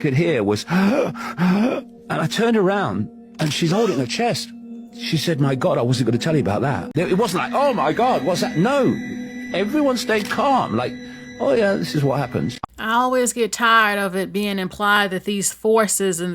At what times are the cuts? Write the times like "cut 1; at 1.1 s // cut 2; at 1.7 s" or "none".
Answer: cut 1; at 6.9 s // cut 2; at 12.6 s